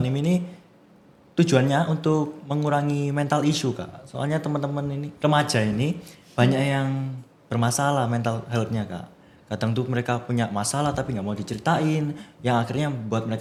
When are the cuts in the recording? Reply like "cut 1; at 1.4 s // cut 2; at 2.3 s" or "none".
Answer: none

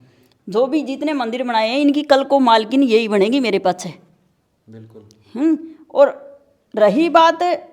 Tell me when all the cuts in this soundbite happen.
none

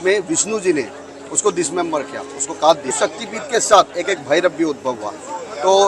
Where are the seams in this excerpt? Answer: cut 1; at 2.9 s

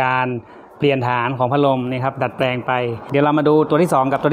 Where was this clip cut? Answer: cut 1; at 3.0 s

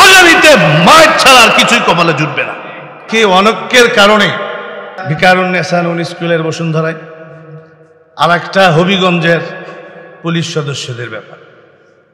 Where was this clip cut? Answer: cut 1; at 3.0 s // cut 2; at 5.0 s

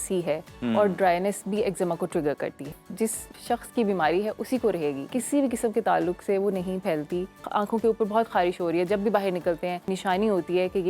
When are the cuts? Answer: cut 1; at 3.2 s // cut 2; at 5.1 s // cut 3; at 7.4 s // cut 4; at 9.9 s

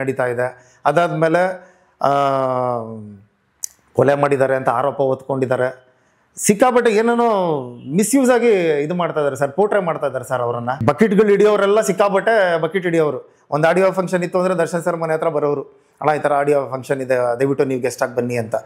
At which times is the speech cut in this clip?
cut 1; at 10.8 s

